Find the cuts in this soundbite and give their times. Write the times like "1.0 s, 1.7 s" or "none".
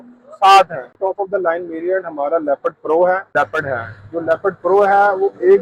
1.0 s